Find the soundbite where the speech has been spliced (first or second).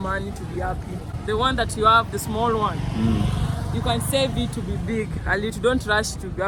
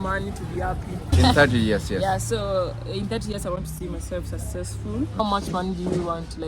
second